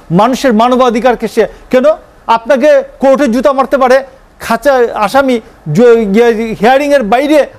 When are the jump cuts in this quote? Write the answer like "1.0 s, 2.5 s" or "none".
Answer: none